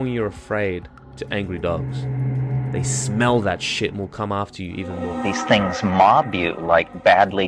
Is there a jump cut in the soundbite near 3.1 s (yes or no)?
no